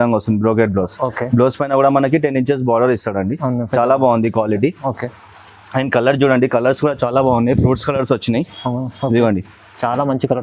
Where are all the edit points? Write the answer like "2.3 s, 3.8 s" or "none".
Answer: none